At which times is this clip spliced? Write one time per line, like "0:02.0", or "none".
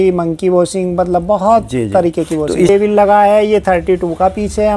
0:02.7